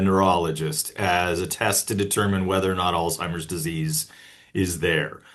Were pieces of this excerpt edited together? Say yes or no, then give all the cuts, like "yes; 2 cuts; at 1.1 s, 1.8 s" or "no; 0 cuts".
no; 0 cuts